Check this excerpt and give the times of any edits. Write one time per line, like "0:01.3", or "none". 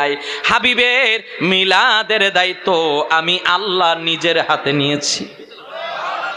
none